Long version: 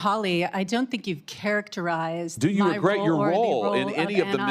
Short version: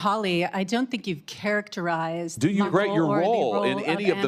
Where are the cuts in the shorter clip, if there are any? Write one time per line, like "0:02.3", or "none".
0:02.7